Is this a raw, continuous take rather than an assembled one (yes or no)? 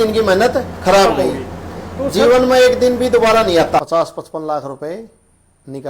no